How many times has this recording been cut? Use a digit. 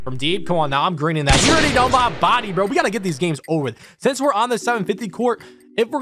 0